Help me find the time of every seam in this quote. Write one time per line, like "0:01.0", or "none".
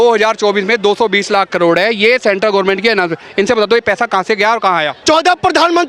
0:04.9